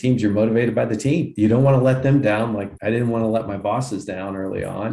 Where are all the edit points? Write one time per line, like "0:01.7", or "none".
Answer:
0:01.3
0:02.7